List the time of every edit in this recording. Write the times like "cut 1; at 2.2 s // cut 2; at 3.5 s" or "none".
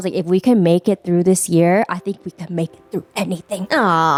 none